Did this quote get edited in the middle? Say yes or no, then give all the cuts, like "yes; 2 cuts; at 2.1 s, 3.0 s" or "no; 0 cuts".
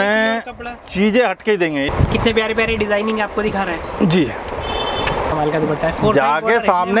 yes; 2 cuts; at 1.9 s, 5.3 s